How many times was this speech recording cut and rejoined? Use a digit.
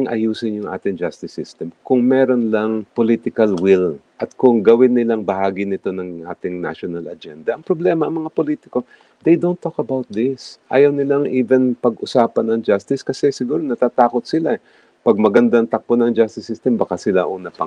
1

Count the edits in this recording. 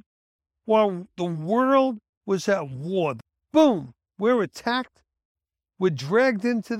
1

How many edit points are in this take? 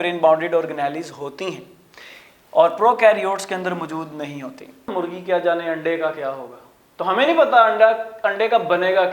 1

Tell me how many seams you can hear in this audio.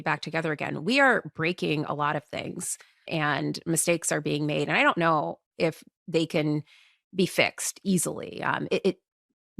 1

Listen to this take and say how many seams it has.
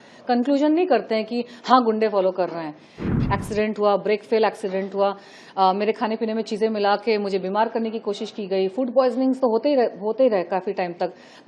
1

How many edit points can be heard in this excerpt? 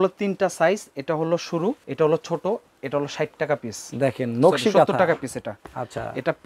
1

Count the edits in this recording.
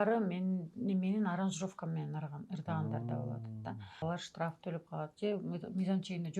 1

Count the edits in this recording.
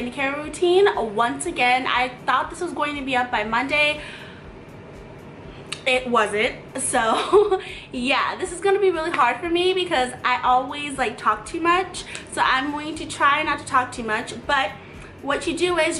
0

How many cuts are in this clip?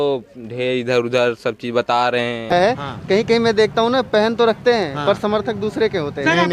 1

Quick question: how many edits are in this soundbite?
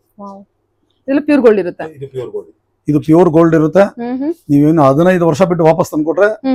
0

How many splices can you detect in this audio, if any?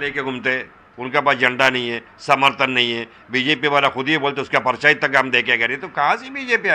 0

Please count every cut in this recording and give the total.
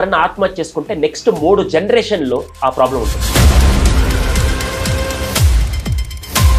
0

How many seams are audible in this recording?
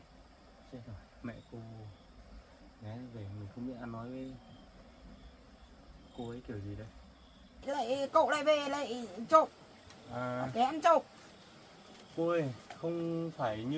1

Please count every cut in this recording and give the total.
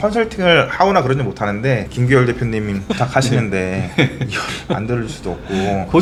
0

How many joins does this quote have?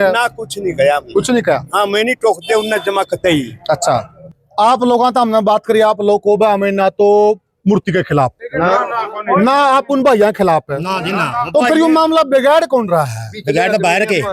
1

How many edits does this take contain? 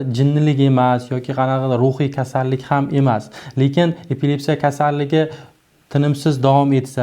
0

